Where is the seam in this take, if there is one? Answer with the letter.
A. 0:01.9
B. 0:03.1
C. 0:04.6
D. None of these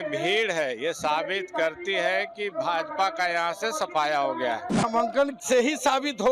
C